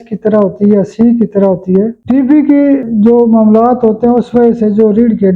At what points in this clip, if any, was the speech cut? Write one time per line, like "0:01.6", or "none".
0:02.0
0:02.9